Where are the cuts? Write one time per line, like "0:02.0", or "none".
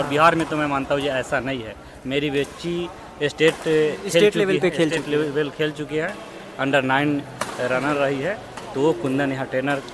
none